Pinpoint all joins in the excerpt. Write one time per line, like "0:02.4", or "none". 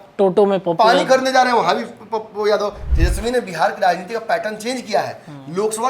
0:02.9